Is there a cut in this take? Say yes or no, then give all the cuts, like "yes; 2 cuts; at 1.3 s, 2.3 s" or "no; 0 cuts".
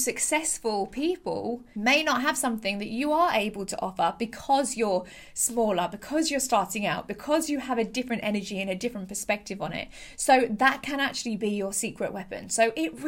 yes; 1 cut; at 1.7 s